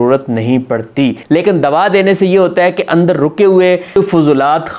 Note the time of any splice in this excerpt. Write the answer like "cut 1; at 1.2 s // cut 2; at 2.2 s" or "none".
cut 1; at 1.2 s // cut 2; at 4.0 s